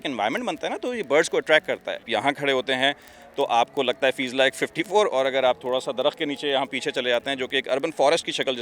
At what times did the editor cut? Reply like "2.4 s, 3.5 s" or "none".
2.1 s